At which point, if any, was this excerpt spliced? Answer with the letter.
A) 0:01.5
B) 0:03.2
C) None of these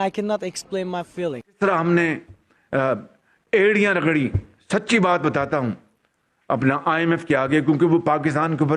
A